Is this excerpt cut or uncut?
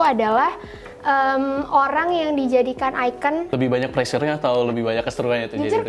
cut